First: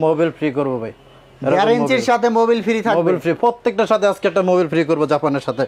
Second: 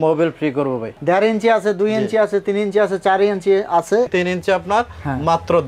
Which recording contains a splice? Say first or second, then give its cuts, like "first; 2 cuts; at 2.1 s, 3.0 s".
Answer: second; 2 cuts; at 1.0 s, 4.1 s